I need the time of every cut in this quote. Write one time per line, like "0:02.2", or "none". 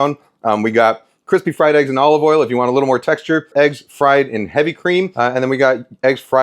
0:03.5
0:05.1